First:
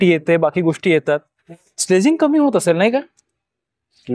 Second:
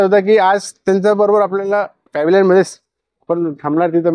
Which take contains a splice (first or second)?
second